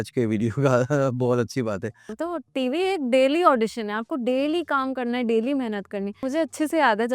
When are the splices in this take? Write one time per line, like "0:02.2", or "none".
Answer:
0:02.1
0:06.2